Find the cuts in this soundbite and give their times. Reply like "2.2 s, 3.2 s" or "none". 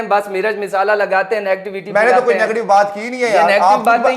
none